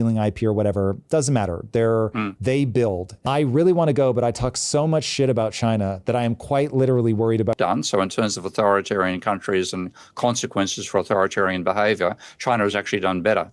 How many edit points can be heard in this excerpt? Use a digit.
2